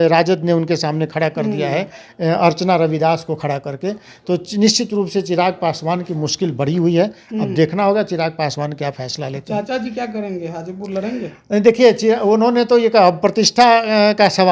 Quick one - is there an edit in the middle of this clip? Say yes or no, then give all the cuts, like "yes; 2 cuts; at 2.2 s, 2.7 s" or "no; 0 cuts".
no; 0 cuts